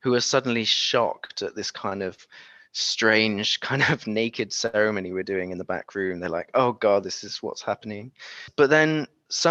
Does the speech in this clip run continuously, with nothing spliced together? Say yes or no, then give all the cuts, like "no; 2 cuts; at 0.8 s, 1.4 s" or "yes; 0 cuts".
no; 1 cut; at 8.4 s